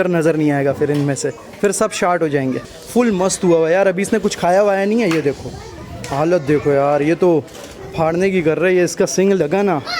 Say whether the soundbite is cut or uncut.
cut